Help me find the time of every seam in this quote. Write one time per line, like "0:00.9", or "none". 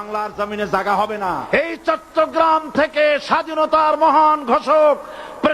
0:01.5